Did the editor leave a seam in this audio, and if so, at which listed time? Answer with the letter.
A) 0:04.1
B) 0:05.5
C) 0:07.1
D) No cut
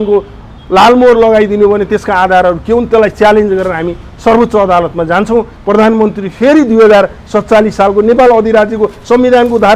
B